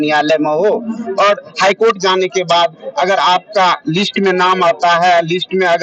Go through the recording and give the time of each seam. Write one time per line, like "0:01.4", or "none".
none